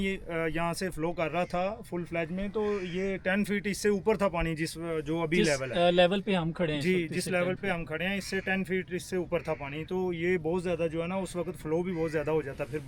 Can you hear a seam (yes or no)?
no